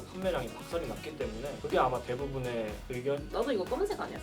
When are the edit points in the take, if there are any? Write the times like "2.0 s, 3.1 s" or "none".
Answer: 3.2 s